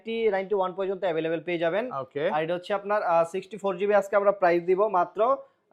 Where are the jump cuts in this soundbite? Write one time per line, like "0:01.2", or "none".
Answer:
none

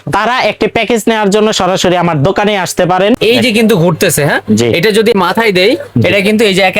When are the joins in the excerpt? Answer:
0:03.2
0:05.1

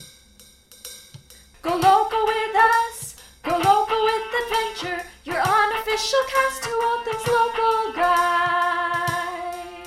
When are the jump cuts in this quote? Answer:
0:01.5

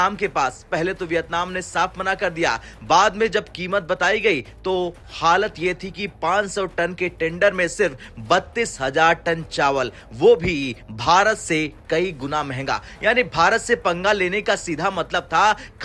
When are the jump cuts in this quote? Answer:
none

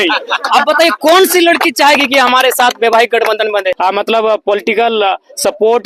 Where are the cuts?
0:03.8

